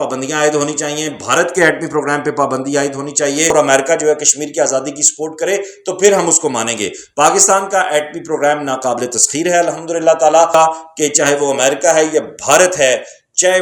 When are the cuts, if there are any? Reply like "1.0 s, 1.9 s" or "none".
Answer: 3.5 s, 10.5 s